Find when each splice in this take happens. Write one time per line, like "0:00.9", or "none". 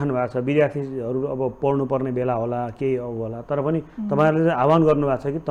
none